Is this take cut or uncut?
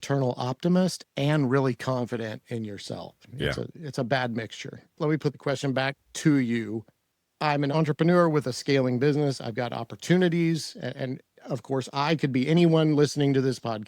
cut